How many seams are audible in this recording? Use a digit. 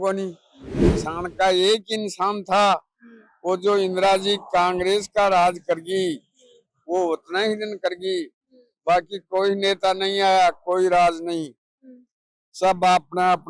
1